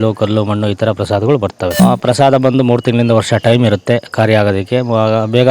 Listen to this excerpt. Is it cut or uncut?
cut